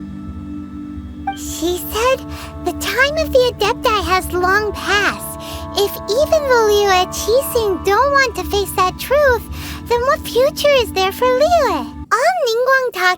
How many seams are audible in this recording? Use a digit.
1